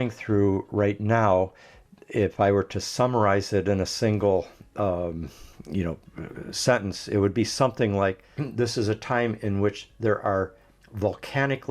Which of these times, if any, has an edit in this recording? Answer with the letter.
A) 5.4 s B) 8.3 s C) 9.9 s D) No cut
B